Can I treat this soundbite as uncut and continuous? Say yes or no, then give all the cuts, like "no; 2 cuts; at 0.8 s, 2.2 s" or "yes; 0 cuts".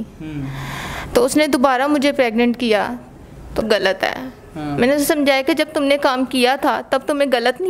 no; 1 cut; at 3.6 s